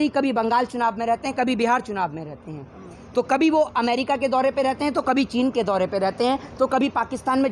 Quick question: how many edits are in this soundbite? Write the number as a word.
zero